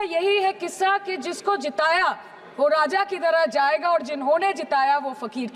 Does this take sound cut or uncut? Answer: uncut